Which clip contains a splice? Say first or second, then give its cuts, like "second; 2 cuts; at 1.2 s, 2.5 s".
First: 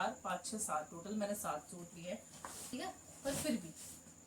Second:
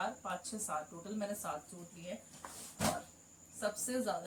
first; 1 cut; at 2.7 s